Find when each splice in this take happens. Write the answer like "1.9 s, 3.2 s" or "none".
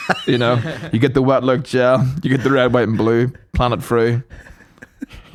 none